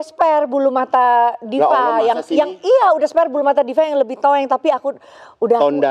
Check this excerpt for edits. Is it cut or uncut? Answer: uncut